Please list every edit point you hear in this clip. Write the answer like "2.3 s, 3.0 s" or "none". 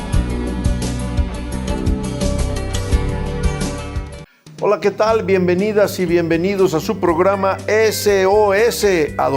4.0 s